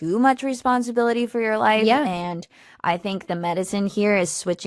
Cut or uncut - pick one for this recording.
uncut